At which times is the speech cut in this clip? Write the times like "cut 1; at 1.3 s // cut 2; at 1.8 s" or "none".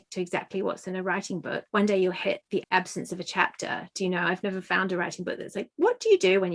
cut 1; at 1.6 s // cut 2; at 2.6 s